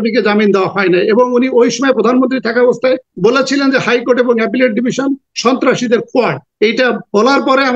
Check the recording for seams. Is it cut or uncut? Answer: cut